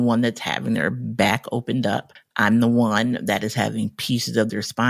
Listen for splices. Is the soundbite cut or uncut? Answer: cut